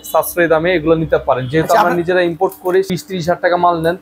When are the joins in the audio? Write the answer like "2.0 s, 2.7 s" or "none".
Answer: 2.9 s

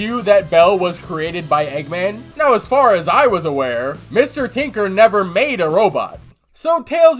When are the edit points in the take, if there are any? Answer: 2.2 s, 6.2 s

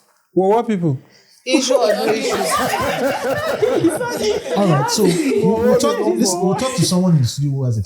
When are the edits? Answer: none

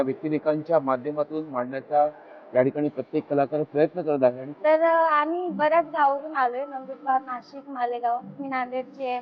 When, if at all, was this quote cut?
4.5 s

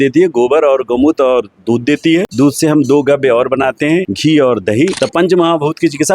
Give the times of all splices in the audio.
2.3 s, 4.1 s, 4.9 s

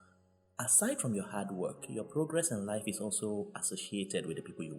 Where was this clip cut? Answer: none

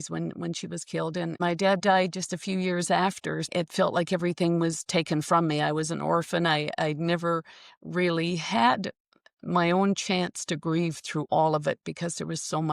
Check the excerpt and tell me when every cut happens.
1.4 s, 3.5 s

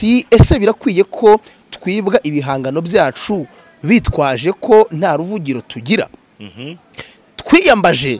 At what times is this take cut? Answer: none

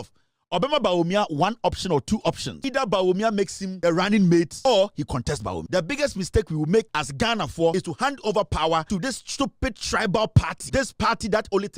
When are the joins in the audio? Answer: 2.5 s, 3.6 s, 4.5 s, 5.6 s, 7.5 s, 8.9 s, 10.6 s

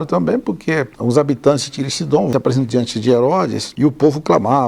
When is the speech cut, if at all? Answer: 0.9 s, 2.3 s, 3.6 s

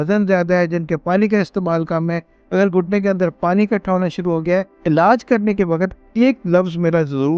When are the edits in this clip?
2.4 s, 4.7 s

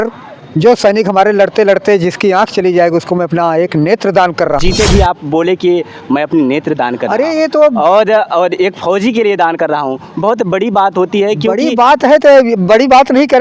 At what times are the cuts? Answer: 4.6 s

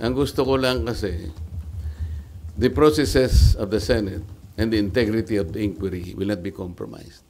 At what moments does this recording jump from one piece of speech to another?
none

